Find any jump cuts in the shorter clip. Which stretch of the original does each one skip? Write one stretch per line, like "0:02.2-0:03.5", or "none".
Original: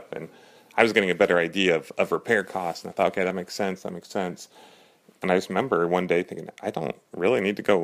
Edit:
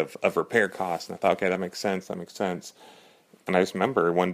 none